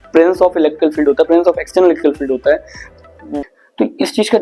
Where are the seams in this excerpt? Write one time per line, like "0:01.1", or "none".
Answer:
0:03.4